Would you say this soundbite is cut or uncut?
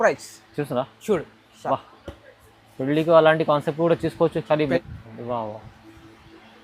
cut